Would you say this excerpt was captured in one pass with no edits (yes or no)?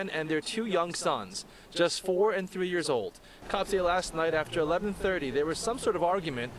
no